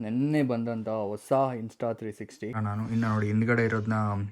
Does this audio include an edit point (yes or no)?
yes